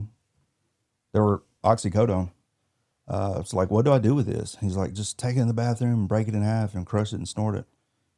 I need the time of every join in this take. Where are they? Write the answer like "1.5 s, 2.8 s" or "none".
none